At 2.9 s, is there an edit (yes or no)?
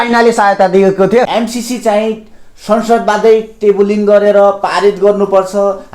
no